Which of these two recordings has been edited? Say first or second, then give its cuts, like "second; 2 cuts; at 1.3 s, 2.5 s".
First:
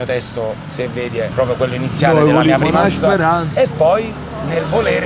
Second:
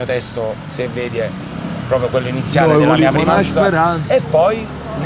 first; 1 cut; at 1.3 s